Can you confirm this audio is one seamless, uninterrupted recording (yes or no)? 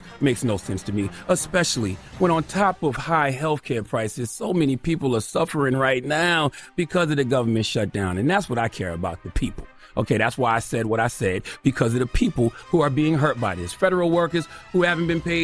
yes